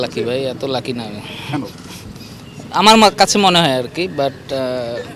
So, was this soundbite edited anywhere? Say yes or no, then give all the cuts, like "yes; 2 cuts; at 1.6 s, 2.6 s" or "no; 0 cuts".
no; 0 cuts